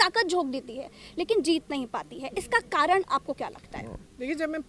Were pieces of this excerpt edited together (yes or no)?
no